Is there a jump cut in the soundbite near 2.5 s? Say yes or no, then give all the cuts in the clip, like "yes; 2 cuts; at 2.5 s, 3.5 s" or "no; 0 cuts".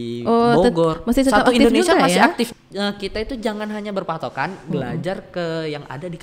yes; 1 cut; at 2.5 s